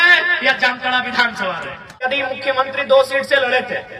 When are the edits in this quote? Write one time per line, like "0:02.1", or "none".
0:02.1